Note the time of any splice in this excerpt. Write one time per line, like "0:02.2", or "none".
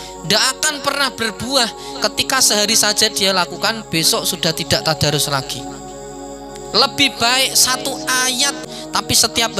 0:08.6